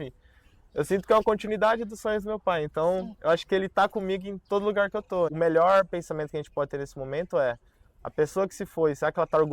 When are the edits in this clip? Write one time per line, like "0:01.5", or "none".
0:05.3